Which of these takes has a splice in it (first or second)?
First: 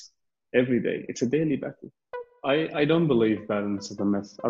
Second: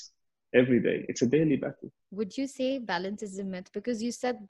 first